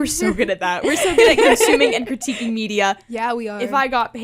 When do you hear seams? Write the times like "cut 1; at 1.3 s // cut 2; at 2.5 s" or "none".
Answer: none